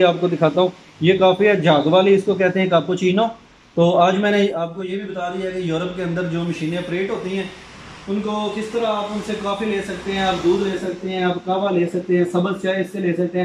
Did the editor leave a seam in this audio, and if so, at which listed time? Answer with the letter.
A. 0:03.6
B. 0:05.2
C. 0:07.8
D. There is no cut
D